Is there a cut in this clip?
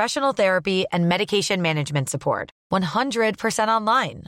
no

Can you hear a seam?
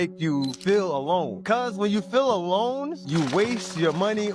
no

